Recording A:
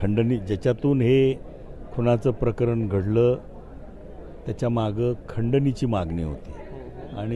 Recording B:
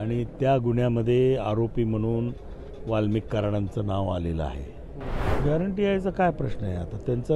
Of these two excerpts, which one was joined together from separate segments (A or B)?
B